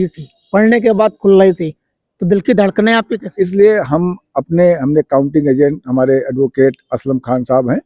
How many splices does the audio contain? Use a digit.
1